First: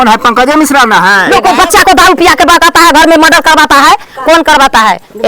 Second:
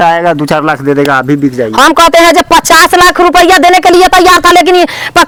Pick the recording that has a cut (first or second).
first